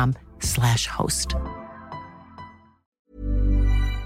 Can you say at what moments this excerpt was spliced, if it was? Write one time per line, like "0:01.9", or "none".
0:03.1